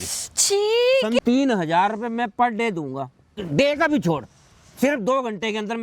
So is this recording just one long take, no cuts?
no; 2 cuts; at 1.2 s, 3.4 s

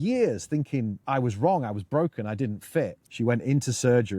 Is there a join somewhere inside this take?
yes; 2 cuts; at 1.0 s, 3.0 s

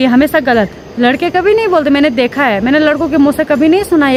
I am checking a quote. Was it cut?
no; 0 cuts

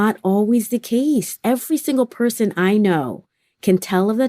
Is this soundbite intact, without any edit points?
no; 1 cut; at 1.3 s

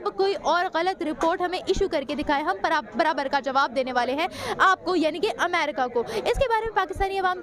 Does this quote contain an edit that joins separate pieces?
no; 0 cuts

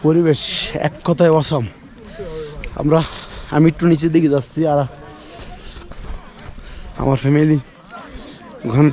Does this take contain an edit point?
no; 0 cuts

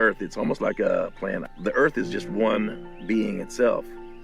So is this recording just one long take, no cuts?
no; 1 cut; at 1.5 s

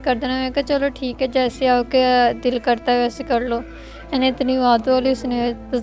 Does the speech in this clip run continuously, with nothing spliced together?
yes; 0 cuts

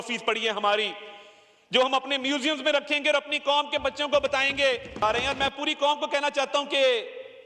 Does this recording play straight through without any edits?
no; 1 cut; at 5.0 s

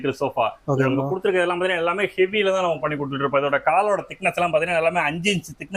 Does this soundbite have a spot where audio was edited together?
no; 0 cuts

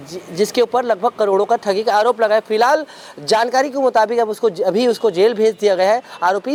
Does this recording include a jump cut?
no; 0 cuts

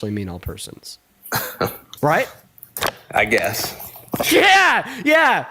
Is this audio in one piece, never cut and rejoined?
no; 1 cut; at 1.8 s

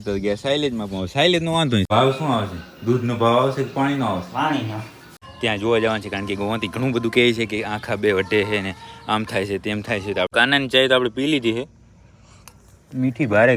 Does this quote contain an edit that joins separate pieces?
yes; 3 cuts; at 1.9 s, 5.0 s, 10.3 s

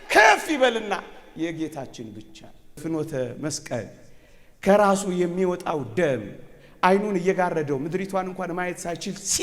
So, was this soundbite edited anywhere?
yes; 1 cut; at 2.8 s

